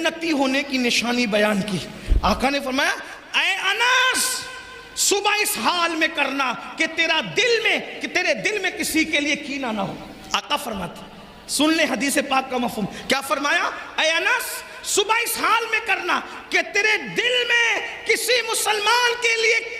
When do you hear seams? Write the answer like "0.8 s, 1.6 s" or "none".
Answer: none